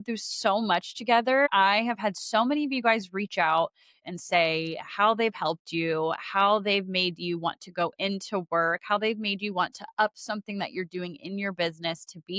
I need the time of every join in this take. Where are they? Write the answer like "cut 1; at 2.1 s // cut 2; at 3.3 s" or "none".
cut 1; at 1.5 s // cut 2; at 4.0 s